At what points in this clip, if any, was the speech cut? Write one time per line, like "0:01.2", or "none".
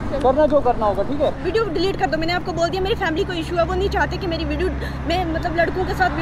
0:01.4